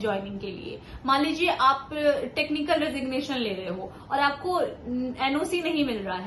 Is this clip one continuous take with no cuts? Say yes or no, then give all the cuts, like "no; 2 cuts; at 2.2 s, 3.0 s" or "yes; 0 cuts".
yes; 0 cuts